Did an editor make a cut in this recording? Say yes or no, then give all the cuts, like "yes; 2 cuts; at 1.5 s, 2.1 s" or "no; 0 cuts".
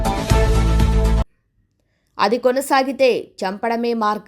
yes; 1 cut; at 1.2 s